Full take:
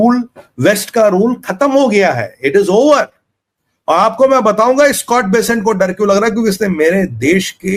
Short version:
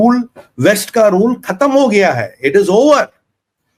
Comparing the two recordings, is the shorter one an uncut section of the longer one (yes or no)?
yes